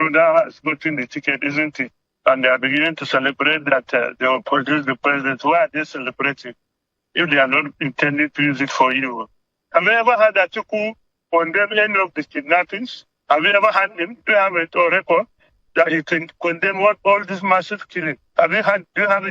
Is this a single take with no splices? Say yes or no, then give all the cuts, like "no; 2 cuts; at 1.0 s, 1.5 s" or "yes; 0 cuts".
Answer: yes; 0 cuts